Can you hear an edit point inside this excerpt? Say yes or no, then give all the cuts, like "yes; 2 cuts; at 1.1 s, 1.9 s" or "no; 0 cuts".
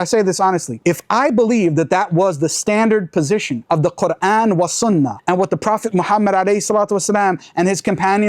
no; 0 cuts